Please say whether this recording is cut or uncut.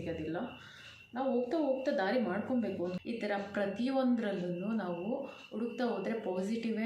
cut